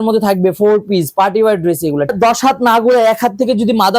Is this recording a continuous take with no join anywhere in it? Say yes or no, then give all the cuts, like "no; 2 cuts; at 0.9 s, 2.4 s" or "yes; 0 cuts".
no; 1 cut; at 2.1 s